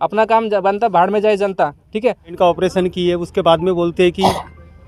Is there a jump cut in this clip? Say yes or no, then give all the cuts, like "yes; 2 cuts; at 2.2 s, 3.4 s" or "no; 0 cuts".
yes; 1 cut; at 2.3 s